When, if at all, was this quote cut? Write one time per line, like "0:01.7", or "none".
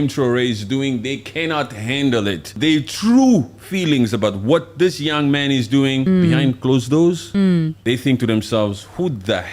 0:02.6
0:06.1
0:07.5